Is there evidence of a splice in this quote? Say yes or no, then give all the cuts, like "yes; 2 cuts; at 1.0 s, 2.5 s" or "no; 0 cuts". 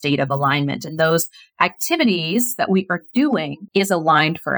yes; 1 cut; at 3.6 s